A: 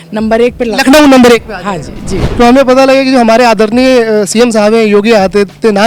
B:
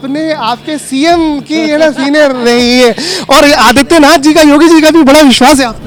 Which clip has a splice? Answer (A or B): A